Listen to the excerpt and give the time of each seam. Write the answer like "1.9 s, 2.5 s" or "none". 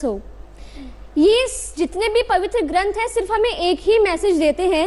none